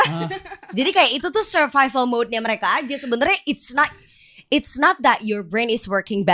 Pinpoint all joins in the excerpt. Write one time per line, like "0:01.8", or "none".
none